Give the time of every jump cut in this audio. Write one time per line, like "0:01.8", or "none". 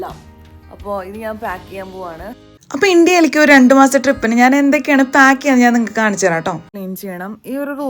0:06.7